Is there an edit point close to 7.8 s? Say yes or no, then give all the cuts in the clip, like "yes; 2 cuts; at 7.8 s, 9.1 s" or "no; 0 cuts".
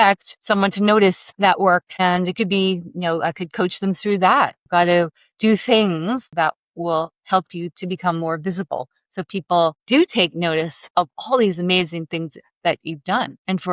no; 2 cuts; at 4.6 s, 6.3 s